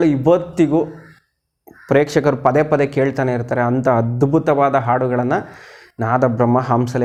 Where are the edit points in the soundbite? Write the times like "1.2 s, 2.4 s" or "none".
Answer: none